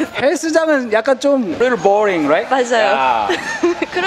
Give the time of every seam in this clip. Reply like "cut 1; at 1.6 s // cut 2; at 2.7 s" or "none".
cut 1; at 1.6 s